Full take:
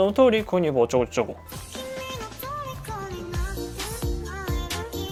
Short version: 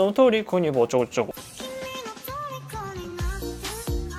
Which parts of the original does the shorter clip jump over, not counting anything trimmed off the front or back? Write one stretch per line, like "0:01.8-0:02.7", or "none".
0:01.4-0:01.6